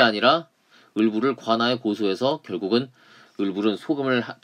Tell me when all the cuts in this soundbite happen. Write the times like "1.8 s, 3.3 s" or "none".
none